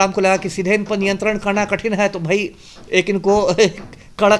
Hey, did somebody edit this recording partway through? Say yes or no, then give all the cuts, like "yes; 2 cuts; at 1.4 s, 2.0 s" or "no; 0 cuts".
no; 0 cuts